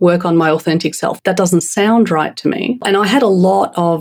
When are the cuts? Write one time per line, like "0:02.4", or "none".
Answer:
0:01.1
0:02.8